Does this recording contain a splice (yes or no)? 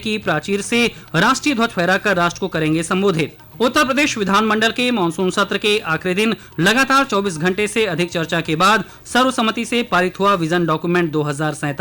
yes